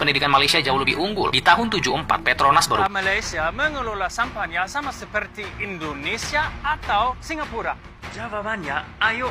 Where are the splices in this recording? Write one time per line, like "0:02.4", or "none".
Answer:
0:02.8